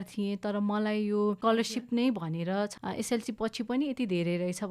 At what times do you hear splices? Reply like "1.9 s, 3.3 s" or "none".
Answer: 1.4 s, 2.7 s